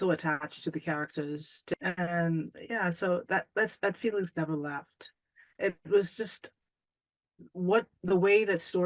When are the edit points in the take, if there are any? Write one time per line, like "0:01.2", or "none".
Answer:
0:01.8